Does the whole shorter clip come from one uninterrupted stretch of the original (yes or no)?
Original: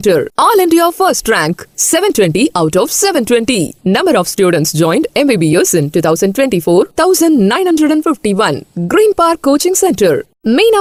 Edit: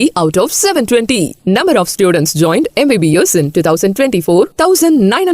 yes